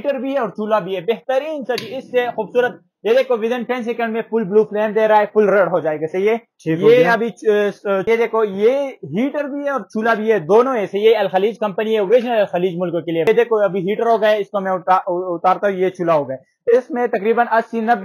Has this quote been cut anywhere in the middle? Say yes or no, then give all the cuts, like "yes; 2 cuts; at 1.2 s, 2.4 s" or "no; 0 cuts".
yes; 2 cuts; at 8.0 s, 13.3 s